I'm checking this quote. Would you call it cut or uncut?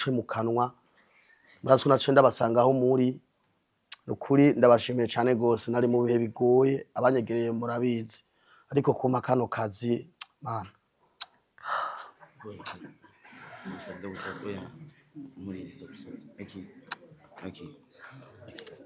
uncut